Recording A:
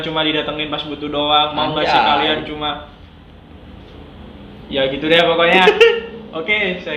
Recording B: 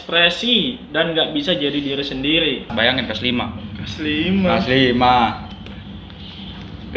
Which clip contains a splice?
B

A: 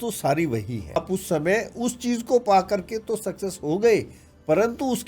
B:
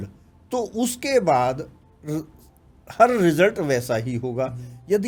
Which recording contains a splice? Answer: A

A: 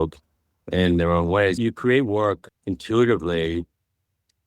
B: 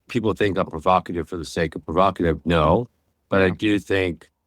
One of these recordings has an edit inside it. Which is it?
A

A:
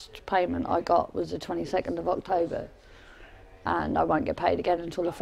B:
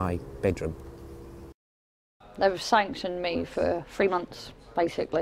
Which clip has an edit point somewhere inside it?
B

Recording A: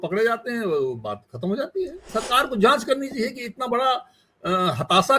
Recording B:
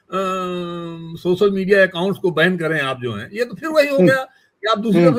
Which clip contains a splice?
A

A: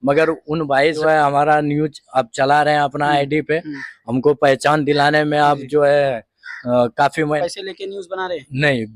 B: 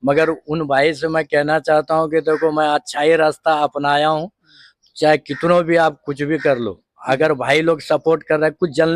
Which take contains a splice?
A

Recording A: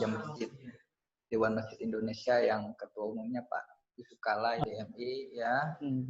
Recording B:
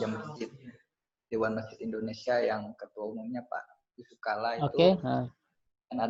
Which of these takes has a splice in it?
A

